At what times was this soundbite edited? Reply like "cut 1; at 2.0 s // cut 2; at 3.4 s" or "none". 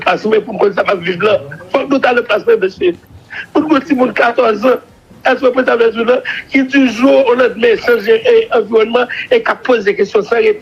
none